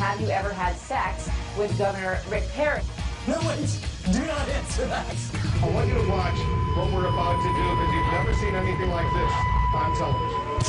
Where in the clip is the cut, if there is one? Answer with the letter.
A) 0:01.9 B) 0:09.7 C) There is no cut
C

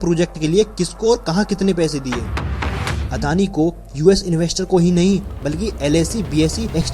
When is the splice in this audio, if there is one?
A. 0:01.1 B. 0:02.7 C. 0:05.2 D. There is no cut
B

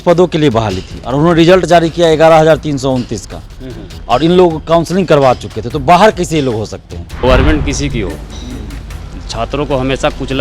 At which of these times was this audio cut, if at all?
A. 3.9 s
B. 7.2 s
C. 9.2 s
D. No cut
B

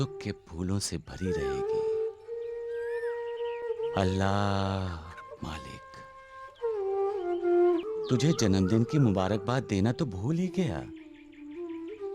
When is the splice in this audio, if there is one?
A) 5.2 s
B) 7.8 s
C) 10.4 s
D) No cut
B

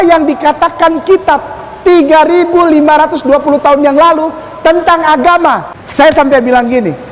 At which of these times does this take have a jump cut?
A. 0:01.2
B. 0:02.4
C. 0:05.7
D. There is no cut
C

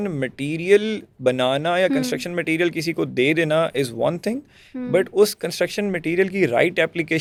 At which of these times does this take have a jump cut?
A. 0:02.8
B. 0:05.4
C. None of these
C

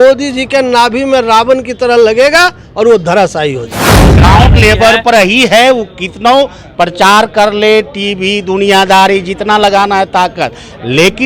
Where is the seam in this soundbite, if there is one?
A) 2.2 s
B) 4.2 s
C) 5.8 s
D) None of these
B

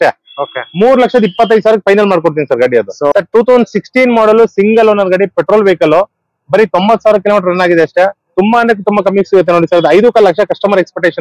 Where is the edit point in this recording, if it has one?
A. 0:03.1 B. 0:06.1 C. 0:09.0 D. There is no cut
A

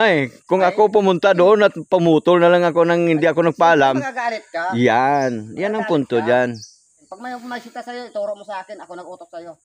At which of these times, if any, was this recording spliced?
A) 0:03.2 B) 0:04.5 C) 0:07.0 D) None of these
C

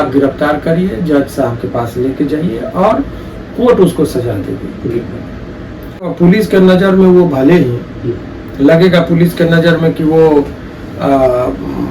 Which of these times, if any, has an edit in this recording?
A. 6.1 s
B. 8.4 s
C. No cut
A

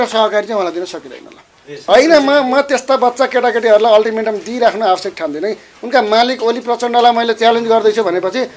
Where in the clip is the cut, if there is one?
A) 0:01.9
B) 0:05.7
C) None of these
A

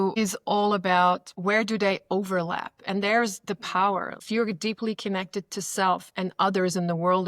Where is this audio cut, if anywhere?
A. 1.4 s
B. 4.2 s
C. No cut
B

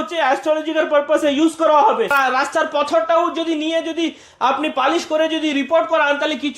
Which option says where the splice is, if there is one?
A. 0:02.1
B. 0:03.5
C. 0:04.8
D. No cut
A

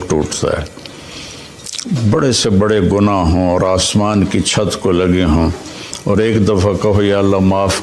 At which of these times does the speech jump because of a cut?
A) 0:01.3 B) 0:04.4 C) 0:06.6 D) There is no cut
D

